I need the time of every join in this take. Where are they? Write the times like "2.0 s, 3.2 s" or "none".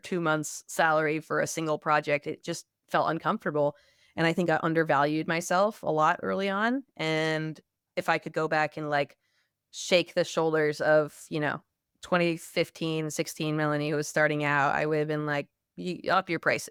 none